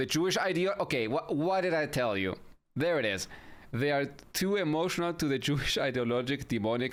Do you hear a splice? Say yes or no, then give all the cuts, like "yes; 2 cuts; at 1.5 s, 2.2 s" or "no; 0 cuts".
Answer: no; 0 cuts